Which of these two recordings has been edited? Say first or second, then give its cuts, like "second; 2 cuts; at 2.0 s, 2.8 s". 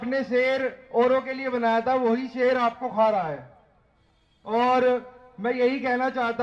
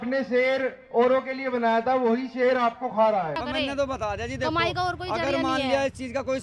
second; 1 cut; at 3.4 s